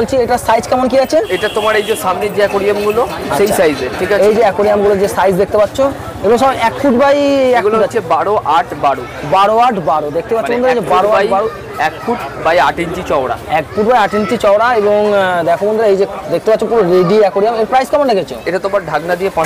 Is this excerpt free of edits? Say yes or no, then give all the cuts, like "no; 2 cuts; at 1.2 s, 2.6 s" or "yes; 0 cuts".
yes; 0 cuts